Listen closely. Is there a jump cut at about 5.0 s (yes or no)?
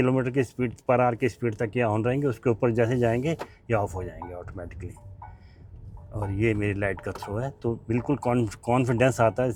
no